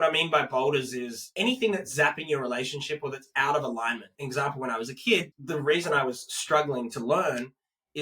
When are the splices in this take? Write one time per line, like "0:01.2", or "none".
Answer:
0:01.3
0:04.1
0:05.4